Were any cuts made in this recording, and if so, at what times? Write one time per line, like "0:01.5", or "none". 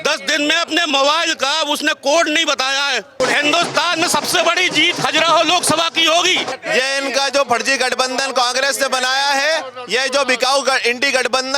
0:03.2
0:06.6